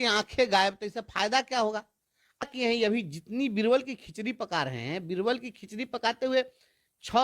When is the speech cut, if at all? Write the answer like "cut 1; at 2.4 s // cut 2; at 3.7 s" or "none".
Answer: cut 1; at 2.4 s